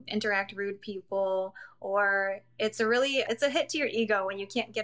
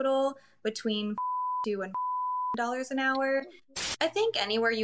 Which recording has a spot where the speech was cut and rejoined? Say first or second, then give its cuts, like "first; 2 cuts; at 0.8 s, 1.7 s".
second; 1 cut; at 3.7 s